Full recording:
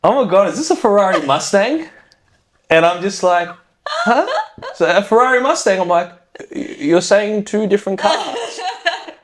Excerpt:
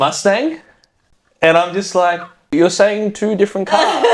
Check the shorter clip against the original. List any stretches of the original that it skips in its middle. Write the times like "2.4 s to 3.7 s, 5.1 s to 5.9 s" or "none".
3.6 s to 6.6 s